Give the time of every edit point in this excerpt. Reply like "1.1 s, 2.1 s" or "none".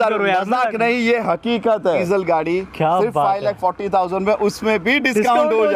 2.0 s